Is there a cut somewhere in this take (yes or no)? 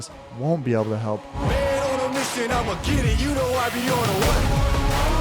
yes